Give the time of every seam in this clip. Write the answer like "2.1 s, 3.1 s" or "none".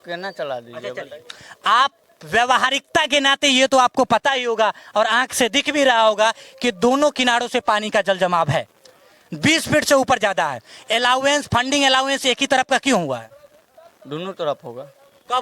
none

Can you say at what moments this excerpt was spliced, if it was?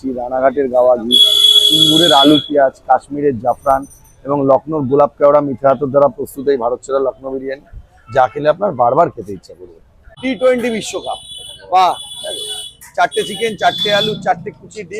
10.1 s

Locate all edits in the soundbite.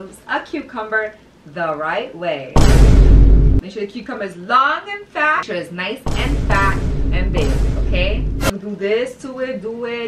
3.6 s, 5.4 s, 8.5 s

